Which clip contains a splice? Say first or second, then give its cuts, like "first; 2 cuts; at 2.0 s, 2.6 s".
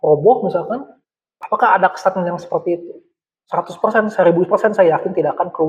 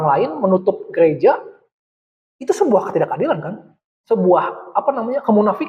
first; 1 cut; at 1.3 s